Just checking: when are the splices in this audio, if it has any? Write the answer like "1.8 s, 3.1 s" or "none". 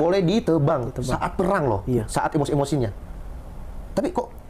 none